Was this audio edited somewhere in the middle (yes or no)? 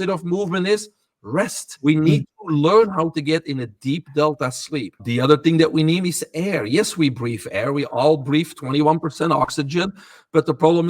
yes